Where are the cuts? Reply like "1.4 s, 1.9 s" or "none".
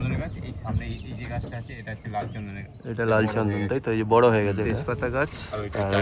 4.7 s